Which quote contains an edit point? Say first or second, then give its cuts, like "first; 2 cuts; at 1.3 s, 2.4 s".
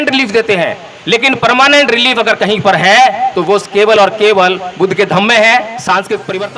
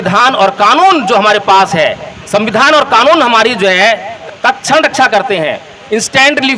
second; 1 cut; at 4.2 s